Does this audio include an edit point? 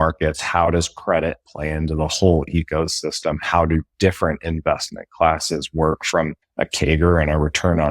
yes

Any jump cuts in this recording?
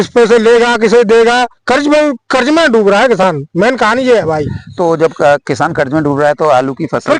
no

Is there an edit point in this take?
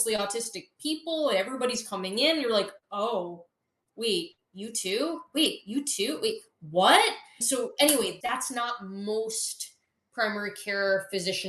no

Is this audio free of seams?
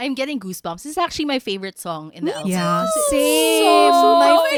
yes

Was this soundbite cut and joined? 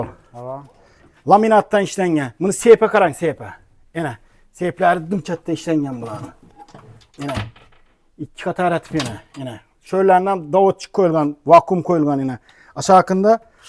no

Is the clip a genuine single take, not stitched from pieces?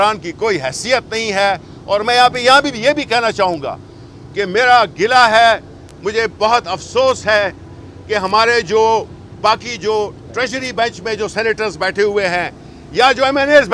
yes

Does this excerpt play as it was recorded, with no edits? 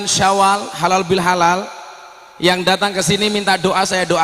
yes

